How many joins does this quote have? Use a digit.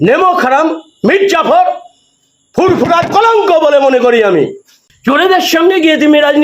1